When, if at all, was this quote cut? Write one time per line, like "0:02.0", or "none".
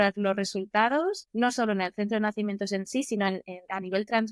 0:01.2